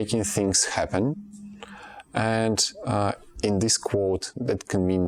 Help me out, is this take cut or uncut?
uncut